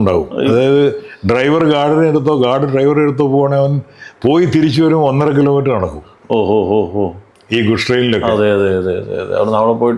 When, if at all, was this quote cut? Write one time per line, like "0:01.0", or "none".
none